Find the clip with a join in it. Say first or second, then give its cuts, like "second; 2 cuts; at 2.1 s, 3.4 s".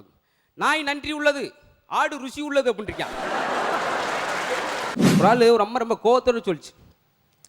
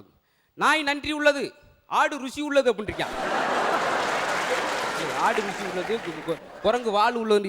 first; 1 cut; at 5.0 s